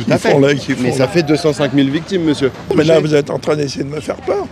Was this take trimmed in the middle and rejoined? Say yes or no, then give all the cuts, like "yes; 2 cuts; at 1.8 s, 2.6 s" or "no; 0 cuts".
yes; 1 cut; at 2.7 s